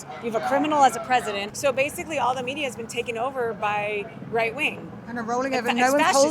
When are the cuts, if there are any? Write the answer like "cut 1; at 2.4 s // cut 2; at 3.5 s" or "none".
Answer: cut 1; at 1.5 s